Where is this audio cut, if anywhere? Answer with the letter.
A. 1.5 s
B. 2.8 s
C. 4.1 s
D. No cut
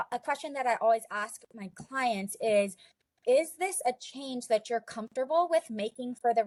D